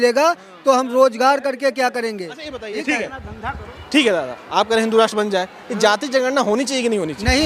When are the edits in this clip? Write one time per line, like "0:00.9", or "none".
none